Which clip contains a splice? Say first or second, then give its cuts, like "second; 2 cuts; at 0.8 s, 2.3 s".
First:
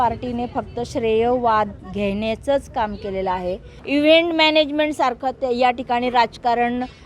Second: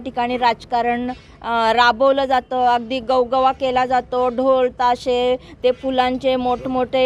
first; 2 cuts; at 1.8 s, 3.8 s